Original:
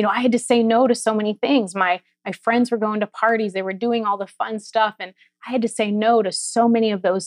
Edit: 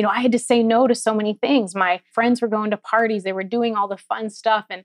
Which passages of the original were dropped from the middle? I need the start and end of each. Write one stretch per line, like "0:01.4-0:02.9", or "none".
0:02.1-0:02.4